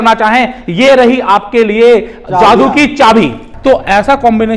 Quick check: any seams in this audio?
yes; 1 cut; at 3.5 s

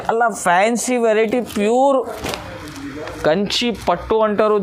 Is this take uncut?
yes; 0 cuts

